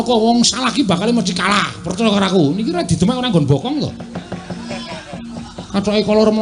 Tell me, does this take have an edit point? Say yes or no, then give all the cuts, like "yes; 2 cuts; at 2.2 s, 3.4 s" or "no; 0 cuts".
yes; 1 cut; at 1.3 s